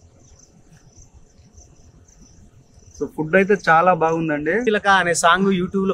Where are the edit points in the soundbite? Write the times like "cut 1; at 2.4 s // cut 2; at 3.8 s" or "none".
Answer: cut 1; at 4.6 s